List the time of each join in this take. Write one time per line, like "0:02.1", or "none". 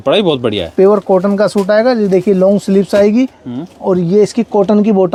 none